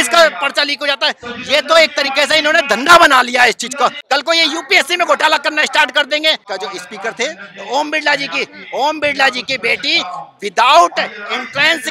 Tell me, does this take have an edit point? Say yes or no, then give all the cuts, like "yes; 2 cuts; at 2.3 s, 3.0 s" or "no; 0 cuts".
yes; 2 cuts; at 4.0 s, 6.4 s